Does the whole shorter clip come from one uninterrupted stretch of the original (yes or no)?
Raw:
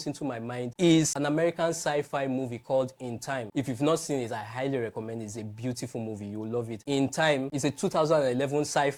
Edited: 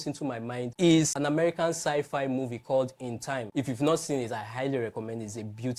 yes